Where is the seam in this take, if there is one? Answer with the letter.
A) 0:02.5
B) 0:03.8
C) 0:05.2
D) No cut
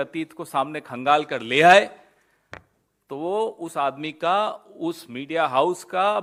D